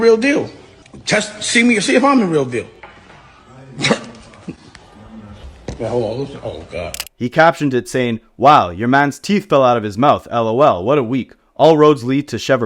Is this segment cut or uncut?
uncut